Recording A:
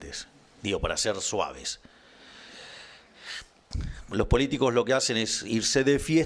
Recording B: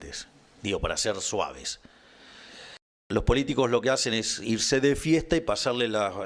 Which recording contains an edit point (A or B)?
B